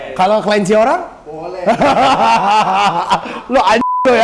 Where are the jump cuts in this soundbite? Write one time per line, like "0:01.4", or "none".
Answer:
none